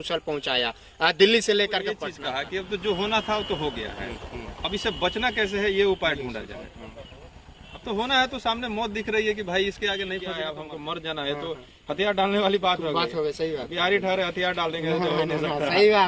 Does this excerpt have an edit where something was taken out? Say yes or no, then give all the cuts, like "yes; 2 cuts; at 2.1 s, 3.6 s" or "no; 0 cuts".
yes; 2 cuts; at 2.1 s, 10.3 s